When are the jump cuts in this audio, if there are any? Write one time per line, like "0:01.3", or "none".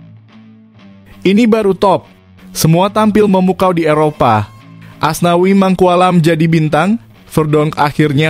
none